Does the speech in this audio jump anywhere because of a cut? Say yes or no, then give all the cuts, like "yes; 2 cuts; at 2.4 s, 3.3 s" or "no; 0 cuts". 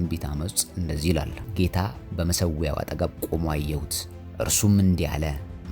yes; 1 cut; at 1.4 s